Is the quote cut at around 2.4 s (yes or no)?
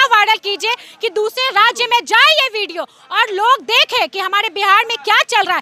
no